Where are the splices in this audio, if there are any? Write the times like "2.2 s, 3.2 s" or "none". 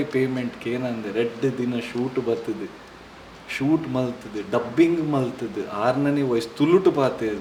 none